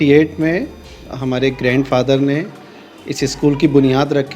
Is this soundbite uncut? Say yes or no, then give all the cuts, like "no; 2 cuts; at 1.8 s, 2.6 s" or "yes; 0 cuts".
yes; 0 cuts